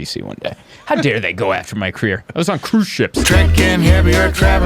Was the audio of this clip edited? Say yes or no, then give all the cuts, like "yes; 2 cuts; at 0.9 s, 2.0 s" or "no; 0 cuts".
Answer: yes; 1 cut; at 3.2 s